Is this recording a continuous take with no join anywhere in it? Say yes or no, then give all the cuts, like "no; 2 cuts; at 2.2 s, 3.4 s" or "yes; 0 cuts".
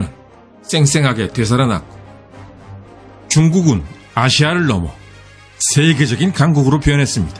yes; 0 cuts